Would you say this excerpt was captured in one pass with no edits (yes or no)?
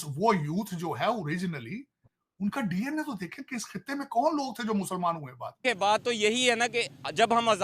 no